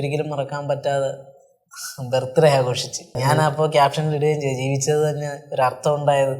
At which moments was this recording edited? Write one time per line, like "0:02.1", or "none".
0:03.1